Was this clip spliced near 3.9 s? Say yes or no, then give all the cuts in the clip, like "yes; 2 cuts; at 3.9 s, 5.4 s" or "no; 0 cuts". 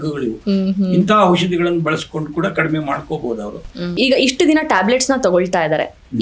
yes; 1 cut; at 3.9 s